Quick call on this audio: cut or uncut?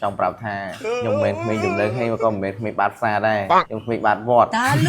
cut